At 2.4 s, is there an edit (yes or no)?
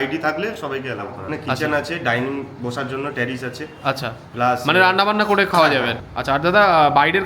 no